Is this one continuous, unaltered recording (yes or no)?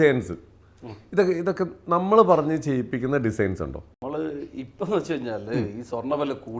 no